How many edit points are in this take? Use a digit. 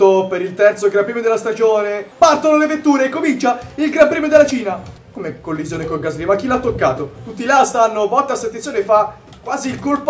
3